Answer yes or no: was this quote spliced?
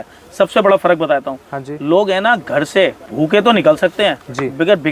yes